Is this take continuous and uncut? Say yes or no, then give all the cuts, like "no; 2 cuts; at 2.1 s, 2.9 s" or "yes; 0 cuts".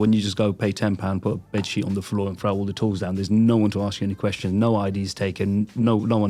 yes; 0 cuts